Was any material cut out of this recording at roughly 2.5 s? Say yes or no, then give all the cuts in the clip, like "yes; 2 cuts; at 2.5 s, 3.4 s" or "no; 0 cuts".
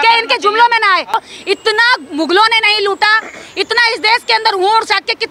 no; 1 cut; at 1.1 s